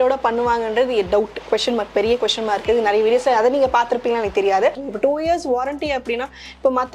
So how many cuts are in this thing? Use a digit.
1